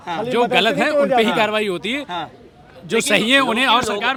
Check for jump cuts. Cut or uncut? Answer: uncut